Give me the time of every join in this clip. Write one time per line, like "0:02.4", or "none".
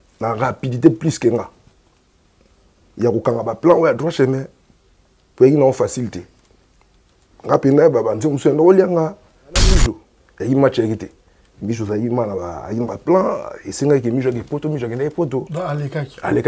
0:09.7